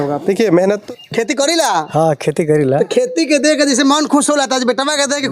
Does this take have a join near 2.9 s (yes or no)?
no